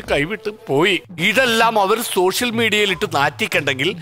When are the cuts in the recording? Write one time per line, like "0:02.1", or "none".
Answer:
0:01.1